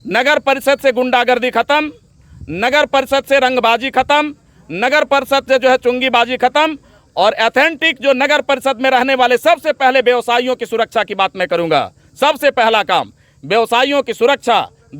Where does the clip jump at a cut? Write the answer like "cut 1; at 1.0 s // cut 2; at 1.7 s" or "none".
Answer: none